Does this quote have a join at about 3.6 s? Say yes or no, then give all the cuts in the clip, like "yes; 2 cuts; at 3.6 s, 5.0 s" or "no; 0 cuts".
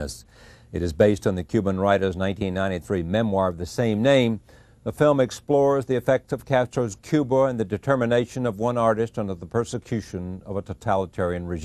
yes; 1 cut; at 3.6 s